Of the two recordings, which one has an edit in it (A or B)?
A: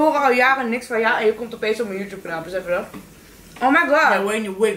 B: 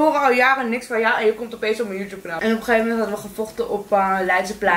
B